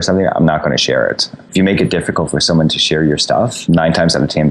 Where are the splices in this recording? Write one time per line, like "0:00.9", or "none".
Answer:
0:01.4